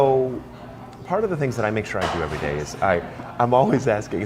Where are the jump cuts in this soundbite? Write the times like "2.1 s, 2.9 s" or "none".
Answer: none